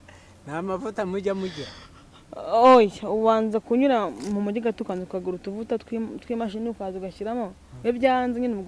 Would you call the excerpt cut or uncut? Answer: uncut